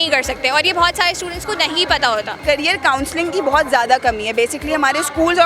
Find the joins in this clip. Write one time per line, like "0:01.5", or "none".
0:02.4